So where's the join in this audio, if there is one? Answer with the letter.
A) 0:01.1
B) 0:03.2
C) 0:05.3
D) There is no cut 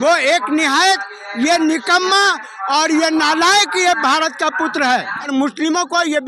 C